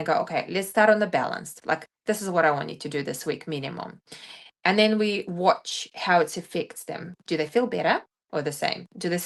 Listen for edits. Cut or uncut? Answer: uncut